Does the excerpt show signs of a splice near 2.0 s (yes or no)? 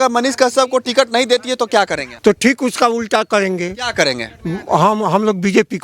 yes